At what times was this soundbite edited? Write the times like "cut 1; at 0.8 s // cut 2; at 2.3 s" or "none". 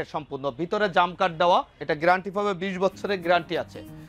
cut 1; at 1.8 s